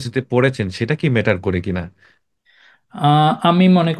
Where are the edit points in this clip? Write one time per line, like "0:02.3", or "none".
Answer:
none